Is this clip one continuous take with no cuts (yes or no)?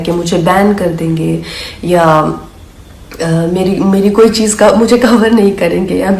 yes